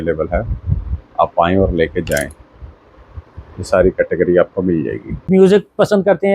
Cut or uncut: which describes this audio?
cut